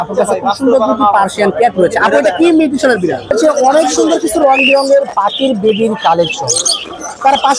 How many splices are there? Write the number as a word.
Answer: one